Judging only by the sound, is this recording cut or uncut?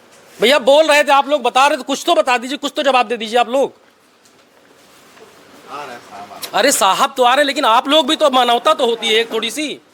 uncut